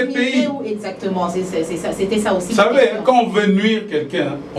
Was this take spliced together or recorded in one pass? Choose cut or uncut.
uncut